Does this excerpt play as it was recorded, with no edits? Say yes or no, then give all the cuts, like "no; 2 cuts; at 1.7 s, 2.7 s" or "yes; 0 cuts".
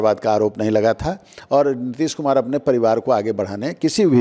yes; 0 cuts